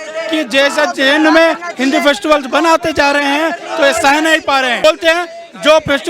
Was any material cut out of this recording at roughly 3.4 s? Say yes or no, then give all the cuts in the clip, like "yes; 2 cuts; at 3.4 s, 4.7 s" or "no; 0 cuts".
no; 1 cut; at 4.8 s